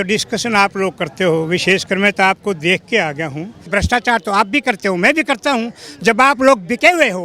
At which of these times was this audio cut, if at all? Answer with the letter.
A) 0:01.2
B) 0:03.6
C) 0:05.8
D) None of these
B